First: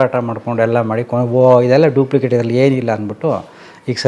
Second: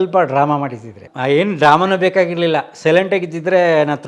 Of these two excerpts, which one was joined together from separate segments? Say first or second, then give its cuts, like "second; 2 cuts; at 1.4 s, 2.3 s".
second; 1 cut; at 1.1 s